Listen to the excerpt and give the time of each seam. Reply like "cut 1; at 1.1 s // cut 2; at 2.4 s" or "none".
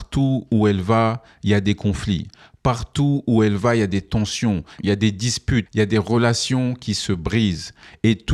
none